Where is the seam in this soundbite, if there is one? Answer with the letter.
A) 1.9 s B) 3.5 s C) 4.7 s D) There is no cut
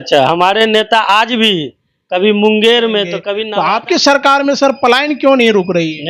B